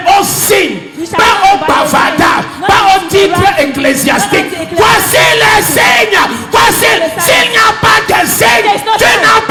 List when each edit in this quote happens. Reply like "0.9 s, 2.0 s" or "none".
none